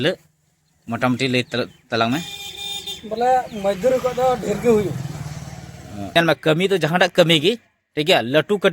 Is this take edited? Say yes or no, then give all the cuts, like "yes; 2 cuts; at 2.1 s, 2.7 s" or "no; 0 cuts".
yes; 1 cut; at 6.0 s